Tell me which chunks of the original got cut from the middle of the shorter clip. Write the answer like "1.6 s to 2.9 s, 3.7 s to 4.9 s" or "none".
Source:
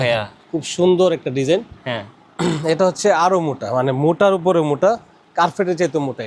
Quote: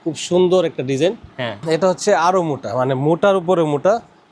2.1 s to 2.6 s